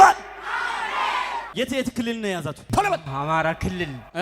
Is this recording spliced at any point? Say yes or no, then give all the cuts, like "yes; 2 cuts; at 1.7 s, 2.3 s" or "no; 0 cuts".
yes; 2 cuts; at 1.4 s, 2.6 s